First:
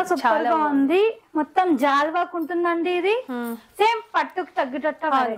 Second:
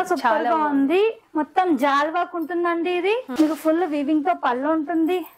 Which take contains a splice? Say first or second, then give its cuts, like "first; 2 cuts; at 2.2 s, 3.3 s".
second; 1 cut; at 3.3 s